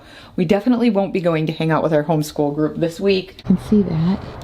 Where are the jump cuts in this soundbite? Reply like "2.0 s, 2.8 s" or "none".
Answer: 3.4 s